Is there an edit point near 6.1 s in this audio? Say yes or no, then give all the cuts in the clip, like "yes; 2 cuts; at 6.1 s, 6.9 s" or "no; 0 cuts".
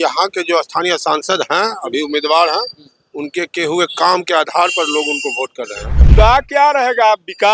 yes; 1 cut; at 6.1 s